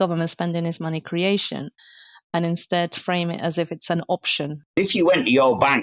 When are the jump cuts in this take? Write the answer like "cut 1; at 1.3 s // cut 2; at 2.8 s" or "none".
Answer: cut 1; at 4.8 s